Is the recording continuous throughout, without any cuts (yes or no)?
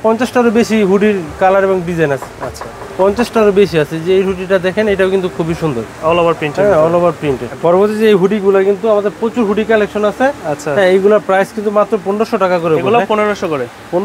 yes